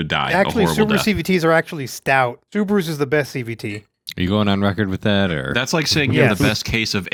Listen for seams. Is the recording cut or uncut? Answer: uncut